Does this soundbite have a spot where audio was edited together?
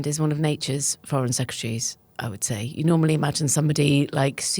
no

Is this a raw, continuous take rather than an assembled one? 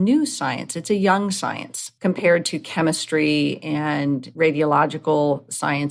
no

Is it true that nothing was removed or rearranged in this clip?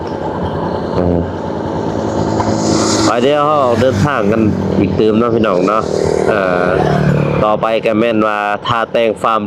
yes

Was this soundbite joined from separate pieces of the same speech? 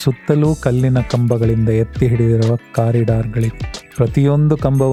no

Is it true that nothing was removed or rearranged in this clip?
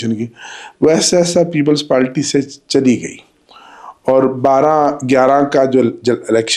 yes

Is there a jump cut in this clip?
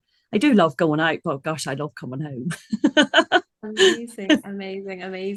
no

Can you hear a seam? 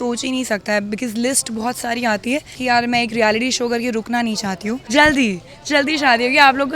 yes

